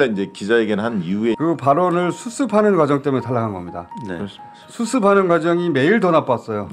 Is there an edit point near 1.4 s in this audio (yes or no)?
yes